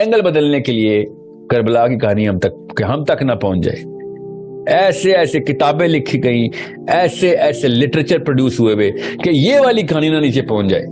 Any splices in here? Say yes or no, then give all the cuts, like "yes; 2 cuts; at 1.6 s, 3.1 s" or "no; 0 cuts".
no; 0 cuts